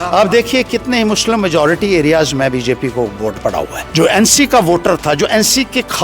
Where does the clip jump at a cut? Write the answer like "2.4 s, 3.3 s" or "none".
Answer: 3.8 s